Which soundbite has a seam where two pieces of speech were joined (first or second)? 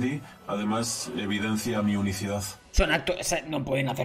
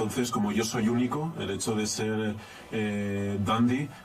first